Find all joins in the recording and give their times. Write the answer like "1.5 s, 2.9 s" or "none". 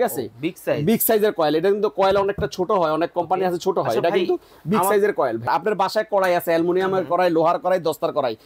5.4 s